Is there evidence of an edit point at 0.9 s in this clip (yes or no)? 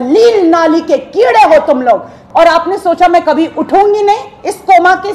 no